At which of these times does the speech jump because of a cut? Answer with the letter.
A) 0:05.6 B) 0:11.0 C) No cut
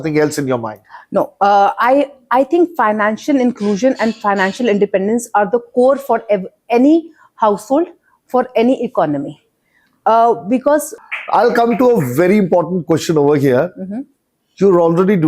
B